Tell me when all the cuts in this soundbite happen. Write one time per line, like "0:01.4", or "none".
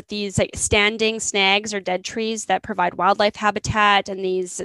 none